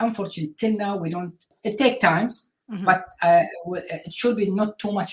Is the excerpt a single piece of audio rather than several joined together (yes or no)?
no